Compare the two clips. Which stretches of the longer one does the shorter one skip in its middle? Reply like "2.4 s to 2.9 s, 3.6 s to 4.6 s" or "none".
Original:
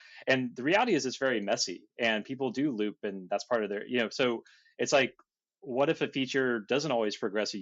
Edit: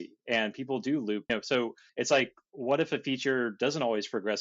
3.3 s to 4.4 s, 5.3 s to 5.5 s